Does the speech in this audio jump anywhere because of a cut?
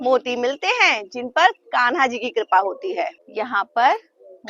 no; 0 cuts

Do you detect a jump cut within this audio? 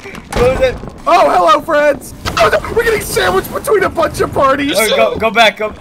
yes; 2 cuts; at 0.9 s, 2.2 s

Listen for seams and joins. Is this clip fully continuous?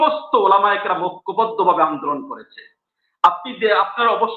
yes; 0 cuts

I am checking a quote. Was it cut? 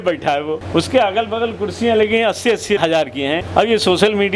no; 0 cuts

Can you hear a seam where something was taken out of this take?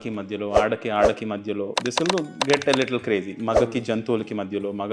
no; 0 cuts

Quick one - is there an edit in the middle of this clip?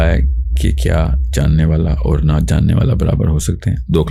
no; 0 cuts

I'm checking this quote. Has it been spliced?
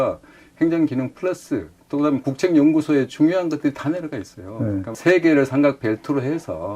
yes; 1 cut; at 4.9 s

